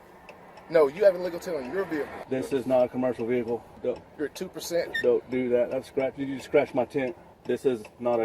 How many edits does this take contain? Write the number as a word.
three